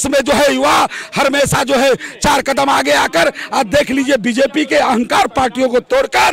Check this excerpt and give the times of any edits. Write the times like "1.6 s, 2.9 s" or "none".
none